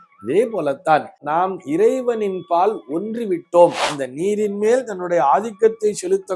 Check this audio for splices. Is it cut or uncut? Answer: cut